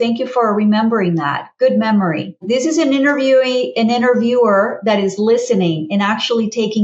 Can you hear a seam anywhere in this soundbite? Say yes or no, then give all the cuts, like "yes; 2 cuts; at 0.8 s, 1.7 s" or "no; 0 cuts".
no; 0 cuts